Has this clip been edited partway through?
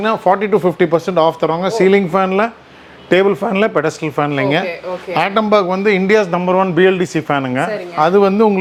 no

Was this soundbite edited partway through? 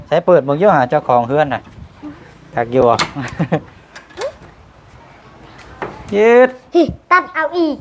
no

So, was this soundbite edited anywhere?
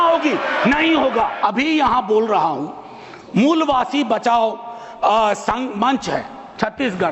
no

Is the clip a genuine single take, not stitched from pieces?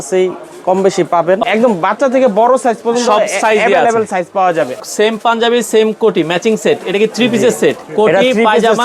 no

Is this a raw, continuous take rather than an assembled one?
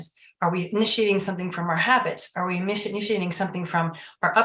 yes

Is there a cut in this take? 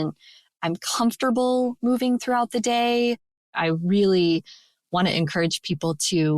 yes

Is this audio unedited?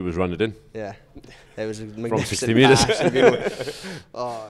yes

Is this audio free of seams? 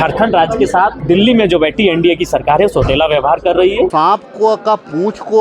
no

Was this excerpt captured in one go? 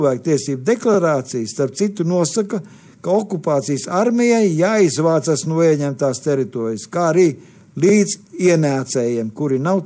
yes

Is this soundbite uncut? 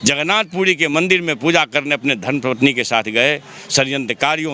yes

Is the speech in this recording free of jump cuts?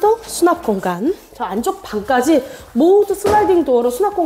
yes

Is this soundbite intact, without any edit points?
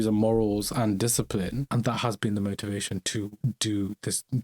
no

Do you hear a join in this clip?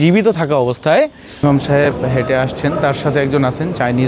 yes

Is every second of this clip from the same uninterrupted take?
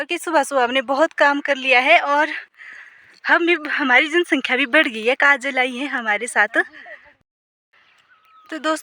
no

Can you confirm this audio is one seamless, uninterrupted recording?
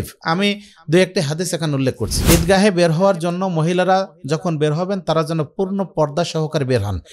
no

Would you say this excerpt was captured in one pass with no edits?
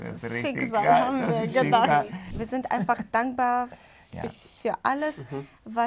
no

